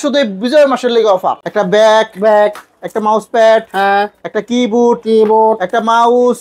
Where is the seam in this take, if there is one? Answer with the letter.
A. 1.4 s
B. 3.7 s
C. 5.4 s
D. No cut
A